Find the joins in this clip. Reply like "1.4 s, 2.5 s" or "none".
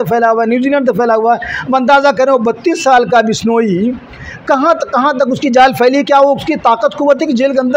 none